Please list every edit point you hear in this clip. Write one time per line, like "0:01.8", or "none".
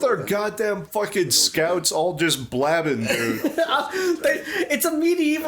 0:04.4